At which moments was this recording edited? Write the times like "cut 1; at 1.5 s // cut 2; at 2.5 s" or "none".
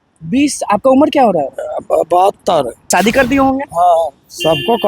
cut 1; at 2.9 s